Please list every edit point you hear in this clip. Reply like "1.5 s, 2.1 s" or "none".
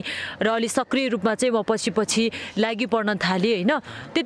none

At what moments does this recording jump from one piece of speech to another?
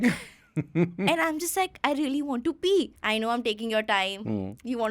3.0 s

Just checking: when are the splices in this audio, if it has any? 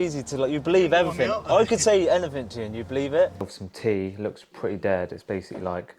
3.4 s

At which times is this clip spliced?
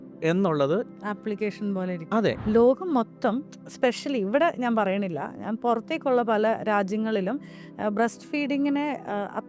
2.4 s

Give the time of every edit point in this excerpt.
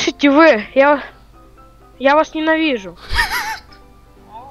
none

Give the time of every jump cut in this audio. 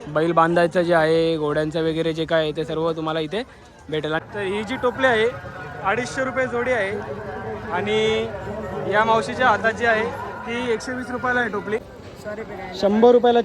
4.2 s, 11.9 s

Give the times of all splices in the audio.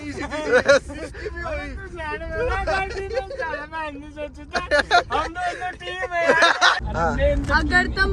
6.8 s

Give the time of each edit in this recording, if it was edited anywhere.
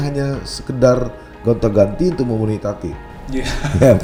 none

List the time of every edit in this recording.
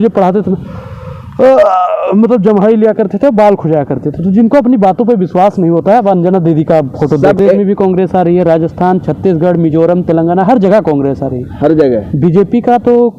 7.4 s

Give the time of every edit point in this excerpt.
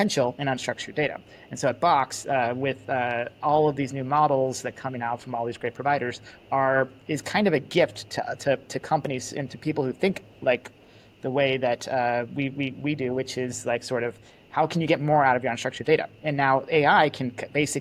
none

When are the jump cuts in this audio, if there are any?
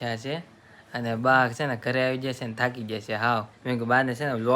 3.5 s

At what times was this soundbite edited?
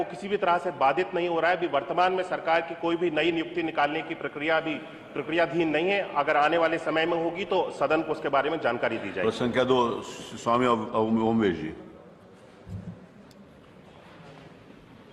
none

